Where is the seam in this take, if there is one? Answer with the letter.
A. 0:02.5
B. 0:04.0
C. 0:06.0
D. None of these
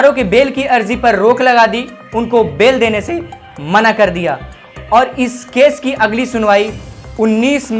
D